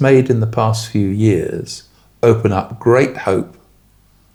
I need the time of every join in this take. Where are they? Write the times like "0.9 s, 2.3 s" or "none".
none